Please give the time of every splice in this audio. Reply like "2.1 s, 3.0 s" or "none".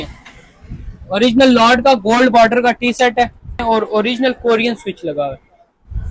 3.6 s